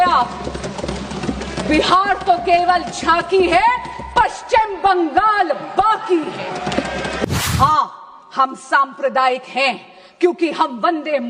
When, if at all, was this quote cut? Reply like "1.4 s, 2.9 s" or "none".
7.3 s